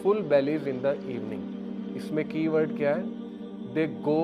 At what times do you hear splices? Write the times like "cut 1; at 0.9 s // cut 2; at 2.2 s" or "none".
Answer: cut 1; at 1.0 s // cut 2; at 2.1 s